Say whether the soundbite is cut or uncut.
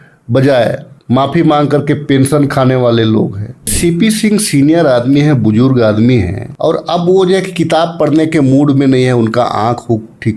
cut